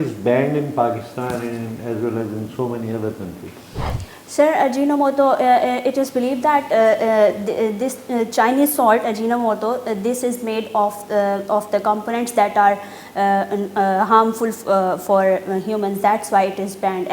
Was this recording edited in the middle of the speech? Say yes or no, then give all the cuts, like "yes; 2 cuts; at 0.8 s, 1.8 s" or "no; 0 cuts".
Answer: no; 0 cuts